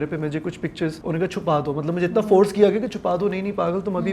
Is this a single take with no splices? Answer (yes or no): no